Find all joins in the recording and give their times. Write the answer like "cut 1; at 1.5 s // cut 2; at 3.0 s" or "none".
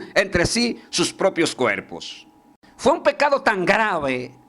cut 1; at 2.6 s